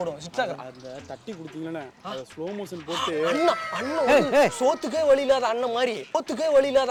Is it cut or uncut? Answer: uncut